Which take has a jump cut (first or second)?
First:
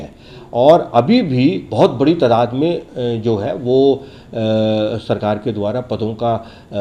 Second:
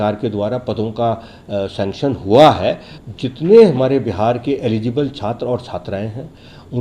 second